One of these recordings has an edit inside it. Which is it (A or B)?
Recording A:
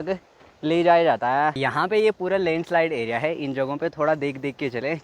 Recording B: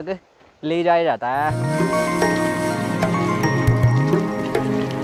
A